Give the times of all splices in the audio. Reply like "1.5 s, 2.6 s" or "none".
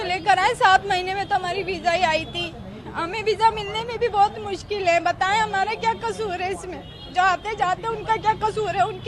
none